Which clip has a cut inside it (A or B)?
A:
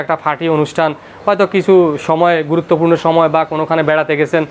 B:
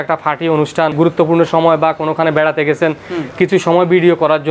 B